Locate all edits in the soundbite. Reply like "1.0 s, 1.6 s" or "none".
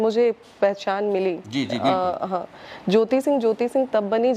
none